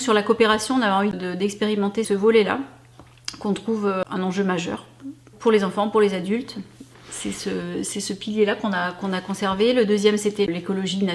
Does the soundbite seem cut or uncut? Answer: cut